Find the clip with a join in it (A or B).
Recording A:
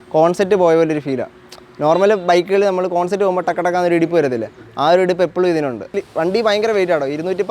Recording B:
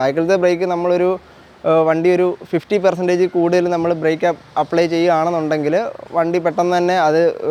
A